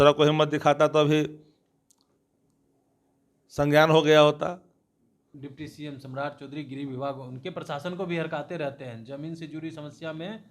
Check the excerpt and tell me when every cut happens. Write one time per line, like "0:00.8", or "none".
0:05.3